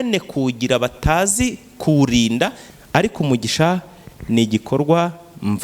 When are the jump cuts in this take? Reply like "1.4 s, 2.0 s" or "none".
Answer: 2.7 s